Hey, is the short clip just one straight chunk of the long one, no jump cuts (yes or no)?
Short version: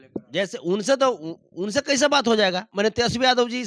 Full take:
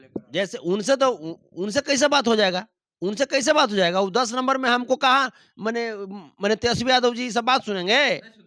no